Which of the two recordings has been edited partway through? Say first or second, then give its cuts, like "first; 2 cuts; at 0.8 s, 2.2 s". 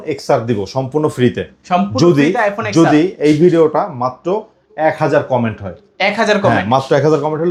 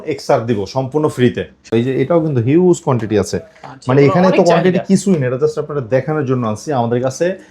second; 1 cut; at 1.7 s